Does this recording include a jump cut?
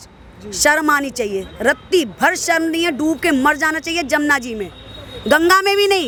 no; 0 cuts

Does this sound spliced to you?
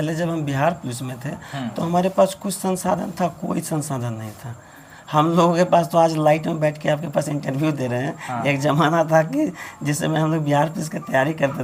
no; 0 cuts

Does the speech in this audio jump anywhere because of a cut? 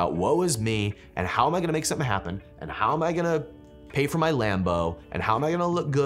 no; 0 cuts

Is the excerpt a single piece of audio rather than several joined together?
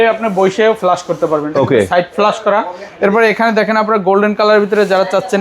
yes; 0 cuts

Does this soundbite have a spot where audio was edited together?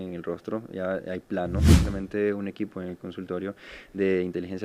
yes; 1 cut; at 1.8 s

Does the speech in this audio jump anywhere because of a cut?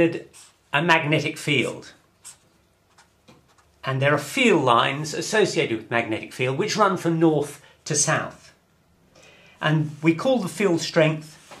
no; 0 cuts

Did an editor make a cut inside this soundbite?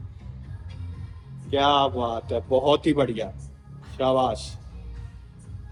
no; 0 cuts

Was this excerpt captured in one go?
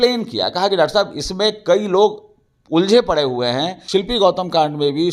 no; 1 cut; at 3.8 s

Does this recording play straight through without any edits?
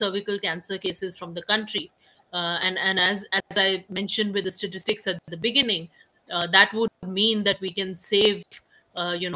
yes; 0 cuts

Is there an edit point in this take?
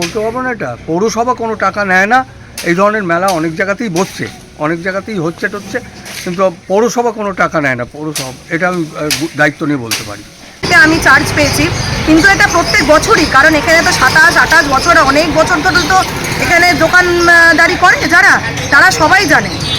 yes; 1 cut; at 10.6 s

